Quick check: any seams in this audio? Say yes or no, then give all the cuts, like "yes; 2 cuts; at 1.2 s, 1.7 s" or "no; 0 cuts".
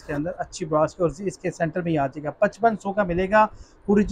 no; 0 cuts